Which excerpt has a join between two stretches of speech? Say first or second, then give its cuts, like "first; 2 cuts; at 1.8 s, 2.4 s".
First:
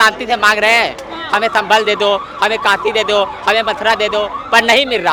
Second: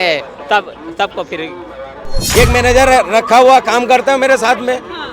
second; 1 cut; at 2.2 s